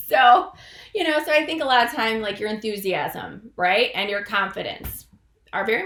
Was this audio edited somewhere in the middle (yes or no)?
no